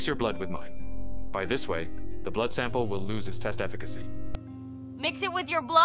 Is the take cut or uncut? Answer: uncut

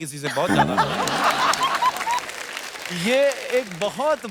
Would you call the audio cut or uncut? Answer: uncut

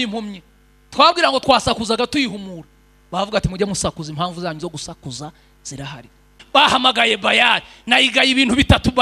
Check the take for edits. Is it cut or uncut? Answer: cut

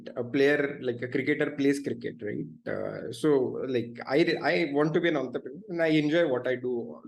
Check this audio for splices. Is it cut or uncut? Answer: uncut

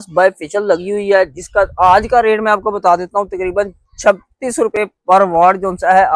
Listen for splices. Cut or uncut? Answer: uncut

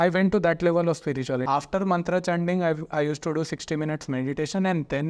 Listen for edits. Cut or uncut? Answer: cut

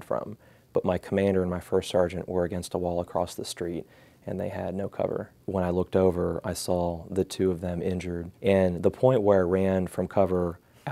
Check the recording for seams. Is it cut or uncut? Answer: cut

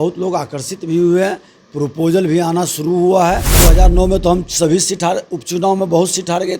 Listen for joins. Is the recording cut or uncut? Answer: cut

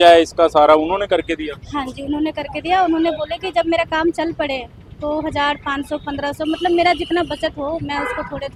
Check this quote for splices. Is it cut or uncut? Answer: uncut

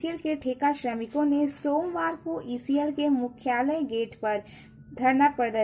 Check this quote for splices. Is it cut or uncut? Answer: uncut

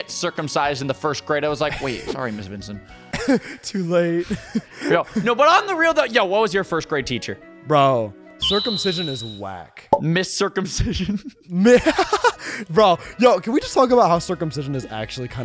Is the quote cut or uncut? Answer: uncut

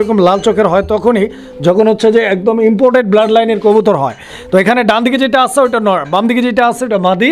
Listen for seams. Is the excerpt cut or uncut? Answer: uncut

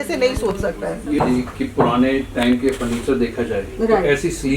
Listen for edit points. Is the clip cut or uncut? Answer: cut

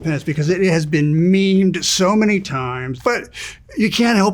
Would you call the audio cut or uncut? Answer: cut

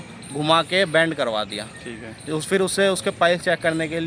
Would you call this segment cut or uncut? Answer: uncut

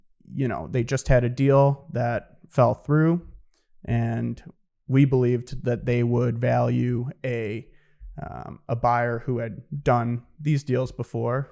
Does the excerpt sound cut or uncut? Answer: uncut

